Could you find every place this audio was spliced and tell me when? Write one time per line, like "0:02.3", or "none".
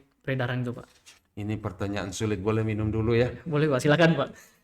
none